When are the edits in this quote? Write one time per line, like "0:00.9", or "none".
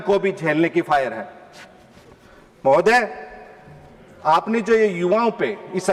none